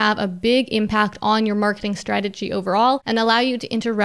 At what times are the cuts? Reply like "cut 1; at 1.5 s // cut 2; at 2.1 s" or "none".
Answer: cut 1; at 3.0 s